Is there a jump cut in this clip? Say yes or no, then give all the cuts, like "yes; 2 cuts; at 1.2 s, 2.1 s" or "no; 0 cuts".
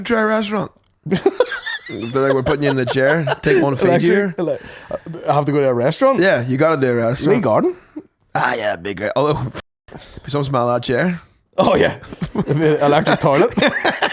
no; 0 cuts